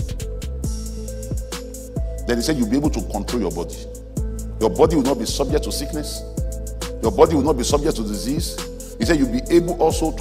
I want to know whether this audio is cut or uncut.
cut